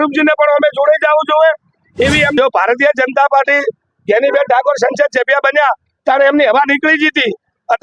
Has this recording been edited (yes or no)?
yes